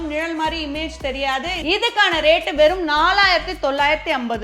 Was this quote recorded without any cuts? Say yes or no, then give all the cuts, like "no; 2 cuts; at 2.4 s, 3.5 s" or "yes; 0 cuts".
no; 1 cut; at 1.5 s